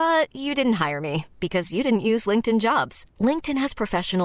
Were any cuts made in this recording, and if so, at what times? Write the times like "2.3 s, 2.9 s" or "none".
none